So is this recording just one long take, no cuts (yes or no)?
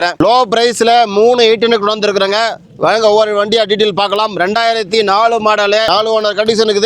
yes